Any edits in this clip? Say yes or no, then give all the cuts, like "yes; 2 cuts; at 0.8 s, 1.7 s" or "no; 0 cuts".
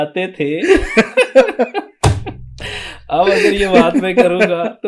no; 0 cuts